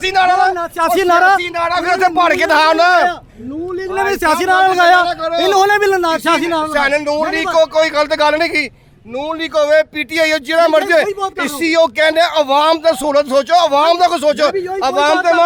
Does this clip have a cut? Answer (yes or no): no